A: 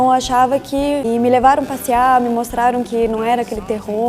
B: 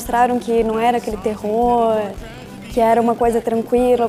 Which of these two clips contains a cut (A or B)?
A